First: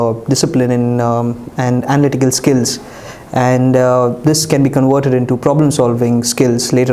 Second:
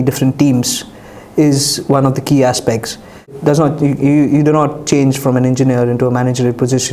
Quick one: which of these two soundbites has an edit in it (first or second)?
second